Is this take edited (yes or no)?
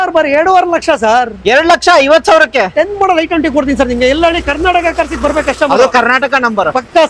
no